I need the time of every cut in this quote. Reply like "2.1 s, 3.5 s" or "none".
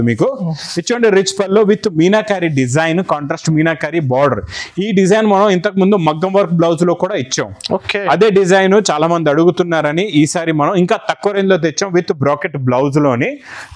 none